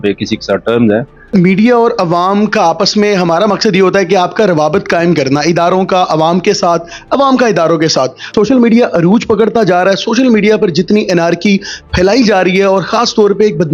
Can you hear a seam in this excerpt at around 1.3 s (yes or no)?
yes